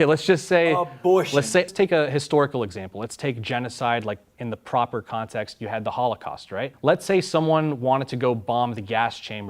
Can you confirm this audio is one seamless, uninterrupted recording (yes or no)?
no